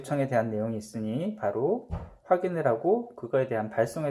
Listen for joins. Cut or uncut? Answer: uncut